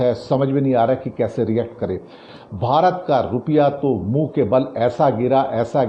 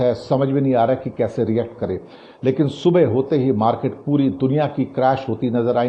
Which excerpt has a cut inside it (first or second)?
first